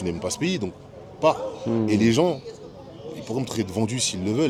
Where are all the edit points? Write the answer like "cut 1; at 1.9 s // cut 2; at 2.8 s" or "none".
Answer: none